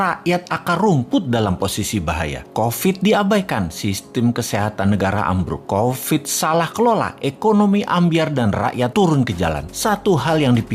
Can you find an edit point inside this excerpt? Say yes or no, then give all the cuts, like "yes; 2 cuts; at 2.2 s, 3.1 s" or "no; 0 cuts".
no; 0 cuts